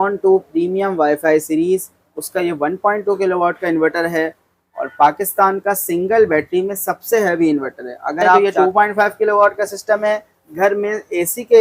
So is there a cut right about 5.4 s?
no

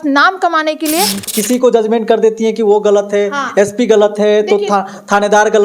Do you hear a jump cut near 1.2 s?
yes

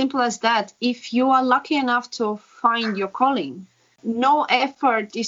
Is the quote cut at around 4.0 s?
yes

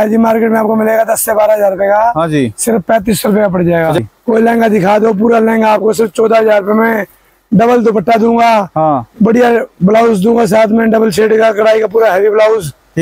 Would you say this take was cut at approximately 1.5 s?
no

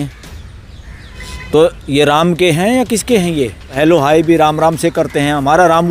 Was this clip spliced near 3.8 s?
yes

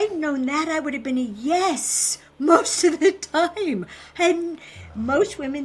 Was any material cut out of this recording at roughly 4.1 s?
no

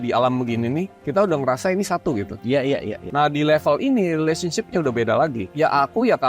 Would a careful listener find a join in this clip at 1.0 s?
no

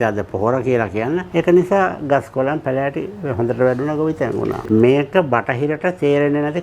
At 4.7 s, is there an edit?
yes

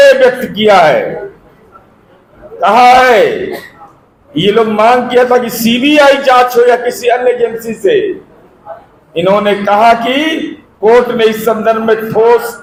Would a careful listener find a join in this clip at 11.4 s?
no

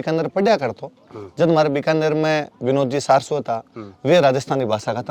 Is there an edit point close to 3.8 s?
no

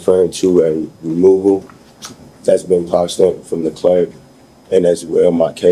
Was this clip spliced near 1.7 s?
no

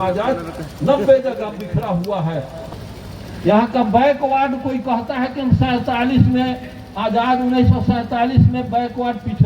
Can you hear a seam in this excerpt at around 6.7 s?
no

